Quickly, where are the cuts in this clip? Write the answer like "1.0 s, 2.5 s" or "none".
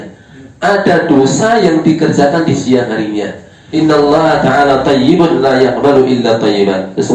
3.6 s